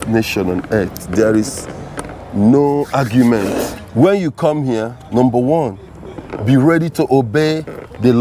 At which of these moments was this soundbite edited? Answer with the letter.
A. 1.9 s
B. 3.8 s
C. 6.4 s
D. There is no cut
B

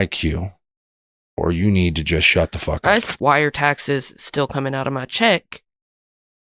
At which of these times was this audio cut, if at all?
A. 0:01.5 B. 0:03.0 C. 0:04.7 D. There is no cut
B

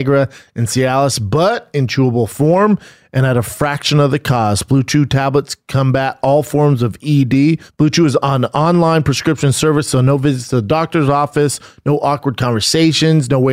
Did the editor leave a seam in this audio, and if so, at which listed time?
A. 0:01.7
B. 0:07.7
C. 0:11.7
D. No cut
B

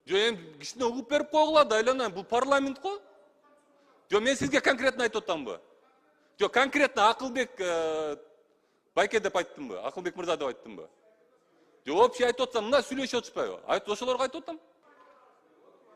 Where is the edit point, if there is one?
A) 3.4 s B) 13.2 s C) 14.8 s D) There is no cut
C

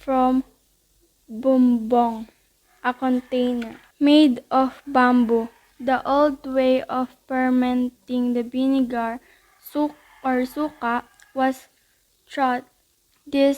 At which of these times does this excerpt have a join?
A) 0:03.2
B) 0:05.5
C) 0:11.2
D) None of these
C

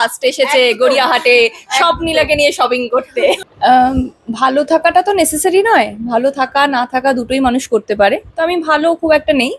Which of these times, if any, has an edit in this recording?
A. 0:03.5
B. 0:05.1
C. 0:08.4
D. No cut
A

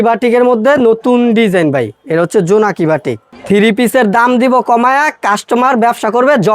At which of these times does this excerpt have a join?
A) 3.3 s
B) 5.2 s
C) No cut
A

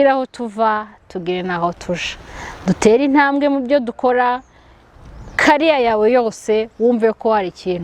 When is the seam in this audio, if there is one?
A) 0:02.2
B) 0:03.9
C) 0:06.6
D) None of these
D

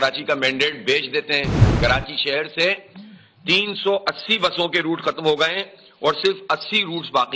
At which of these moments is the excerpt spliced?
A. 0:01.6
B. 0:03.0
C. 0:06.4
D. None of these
A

